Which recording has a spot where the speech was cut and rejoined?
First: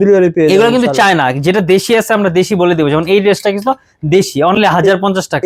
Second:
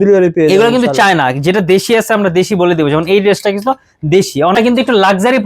second; 1 cut; at 4.6 s

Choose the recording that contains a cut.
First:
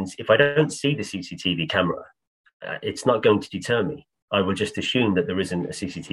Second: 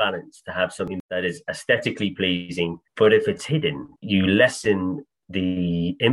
second; 3 cuts; at 0.9 s, 2.8 s, 3.9 s

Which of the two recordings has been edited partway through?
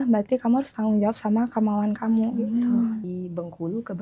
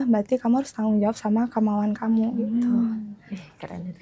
first; 1 cut; at 3.1 s

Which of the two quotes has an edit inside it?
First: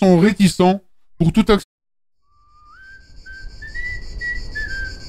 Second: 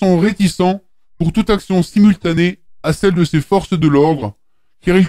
second; 1 cut; at 1.6 s

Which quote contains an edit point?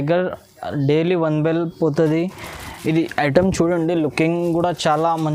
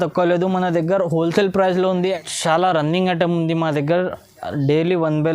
second; 1 cut; at 2.2 s

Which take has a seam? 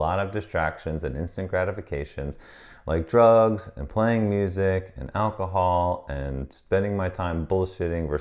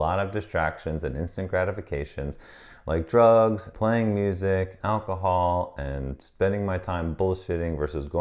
second; 2 cuts; at 3.7 s, 4.7 s

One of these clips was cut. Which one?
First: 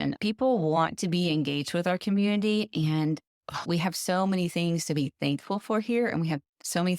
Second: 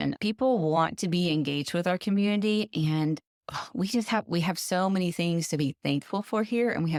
first; 1 cut; at 3.6 s

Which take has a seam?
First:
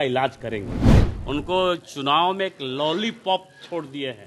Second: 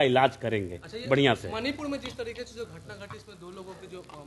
first; 1 cut; at 0.9 s

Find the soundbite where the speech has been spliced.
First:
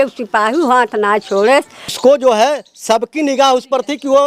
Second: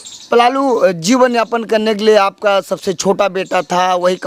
first; 1 cut; at 2.0 s

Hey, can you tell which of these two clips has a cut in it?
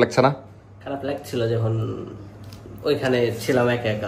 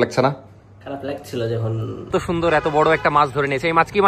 second; 1 cut; at 2.1 s

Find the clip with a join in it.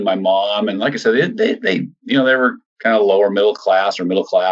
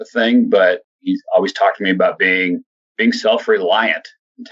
second; 1 cut; at 0.9 s

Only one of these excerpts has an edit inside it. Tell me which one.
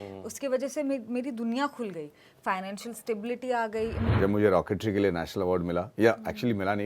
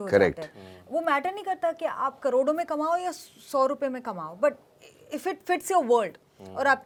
first; 1 cut; at 4.1 s

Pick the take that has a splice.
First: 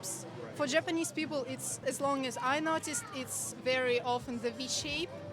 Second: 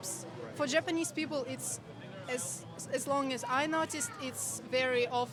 first; 1 cut; at 1.7 s

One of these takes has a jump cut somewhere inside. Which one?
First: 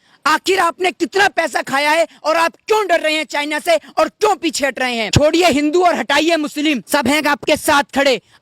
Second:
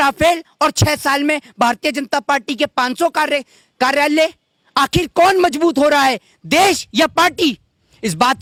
first; 2 cuts; at 5.0 s, 6.8 s

